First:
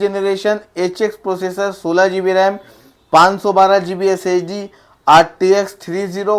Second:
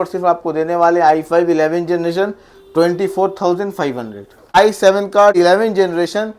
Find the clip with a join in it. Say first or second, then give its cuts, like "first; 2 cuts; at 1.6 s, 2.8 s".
second; 2 cuts; at 4.6 s, 5.4 s